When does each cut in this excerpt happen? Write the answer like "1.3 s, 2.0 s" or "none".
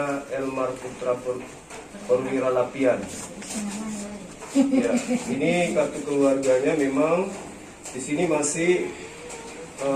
none

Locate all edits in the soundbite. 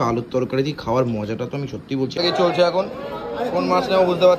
2.1 s

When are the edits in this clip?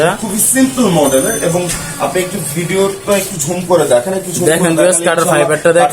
none

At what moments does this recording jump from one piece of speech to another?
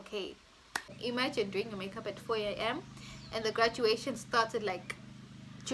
1.0 s

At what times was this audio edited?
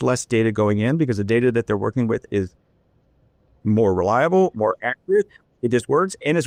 none

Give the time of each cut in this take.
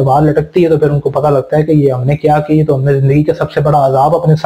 none

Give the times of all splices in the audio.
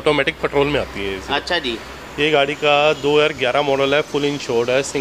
none

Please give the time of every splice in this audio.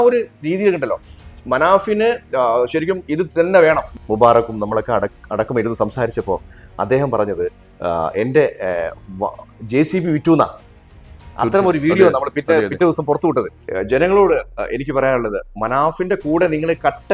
3.9 s, 13.6 s

